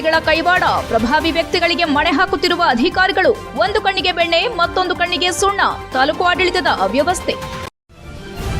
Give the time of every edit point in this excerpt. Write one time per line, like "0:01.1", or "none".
0:07.6